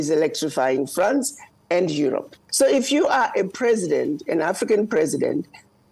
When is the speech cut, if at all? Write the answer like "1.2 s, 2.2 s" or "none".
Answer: 2.4 s

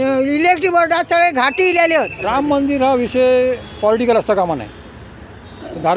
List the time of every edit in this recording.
2.2 s

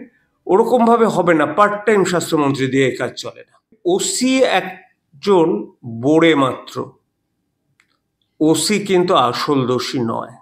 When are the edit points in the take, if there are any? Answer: 3.7 s

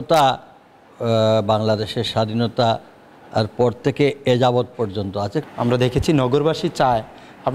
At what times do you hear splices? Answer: 5.4 s

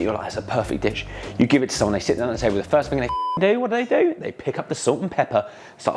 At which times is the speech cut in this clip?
none

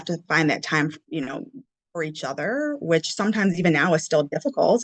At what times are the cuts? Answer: none

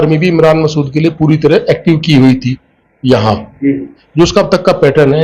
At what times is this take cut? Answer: 4.0 s

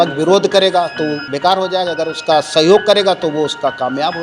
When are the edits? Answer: 1.2 s

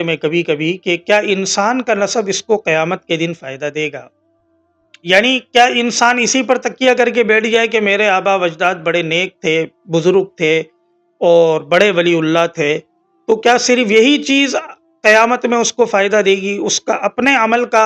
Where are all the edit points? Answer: none

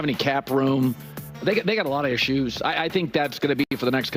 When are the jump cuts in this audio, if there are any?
none

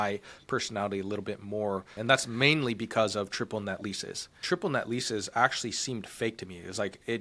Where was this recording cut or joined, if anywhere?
1.9 s, 4.4 s

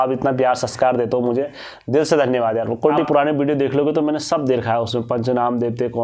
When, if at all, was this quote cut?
3.1 s

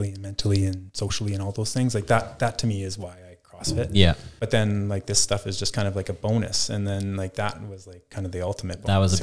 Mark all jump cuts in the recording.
4.3 s

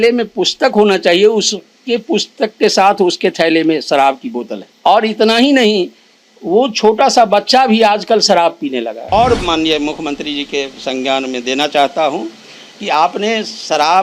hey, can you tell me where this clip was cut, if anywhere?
4.6 s, 9.1 s

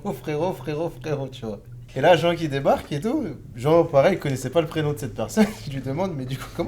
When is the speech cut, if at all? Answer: 1.7 s

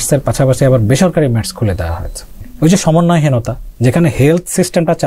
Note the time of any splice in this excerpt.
2.5 s

